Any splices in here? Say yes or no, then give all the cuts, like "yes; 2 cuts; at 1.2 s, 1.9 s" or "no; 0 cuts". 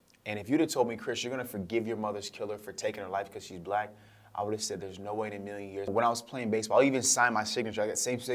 yes; 1 cut; at 5.9 s